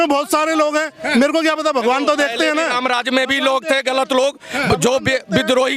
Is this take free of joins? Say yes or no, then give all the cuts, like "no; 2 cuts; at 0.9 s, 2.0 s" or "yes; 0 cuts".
yes; 0 cuts